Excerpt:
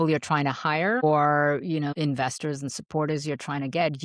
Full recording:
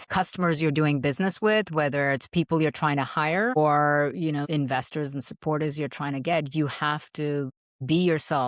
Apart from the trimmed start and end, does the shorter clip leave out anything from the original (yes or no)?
no